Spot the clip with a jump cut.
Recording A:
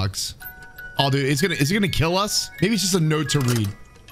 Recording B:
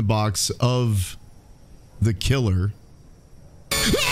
A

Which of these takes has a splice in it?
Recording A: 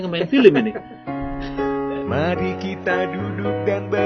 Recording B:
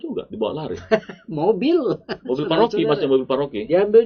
A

